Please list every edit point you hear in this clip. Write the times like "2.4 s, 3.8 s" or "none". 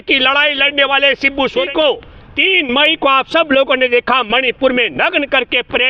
1.7 s